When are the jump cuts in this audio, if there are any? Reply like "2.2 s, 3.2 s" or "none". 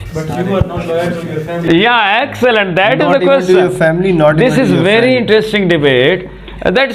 none